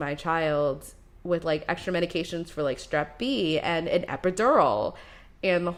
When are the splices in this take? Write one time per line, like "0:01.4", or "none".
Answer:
none